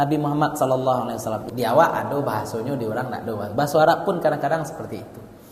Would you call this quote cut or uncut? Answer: cut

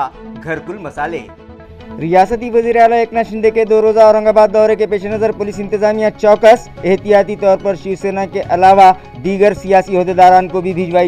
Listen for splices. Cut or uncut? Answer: uncut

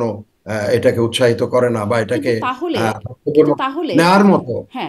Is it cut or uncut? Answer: uncut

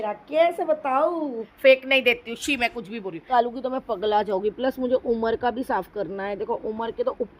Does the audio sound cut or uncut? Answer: cut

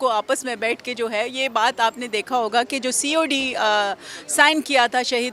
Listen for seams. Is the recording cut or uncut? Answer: uncut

